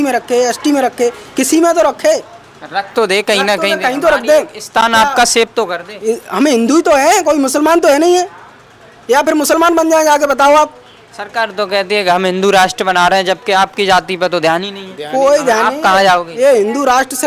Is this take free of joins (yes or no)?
yes